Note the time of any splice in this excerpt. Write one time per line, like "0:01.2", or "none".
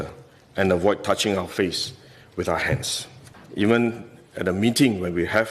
0:03.4